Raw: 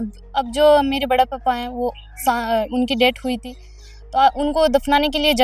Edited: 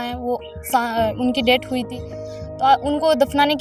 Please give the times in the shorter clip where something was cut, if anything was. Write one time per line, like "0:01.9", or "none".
none